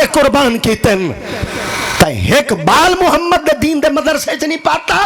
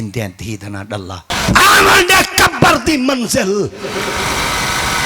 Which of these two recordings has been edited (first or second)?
second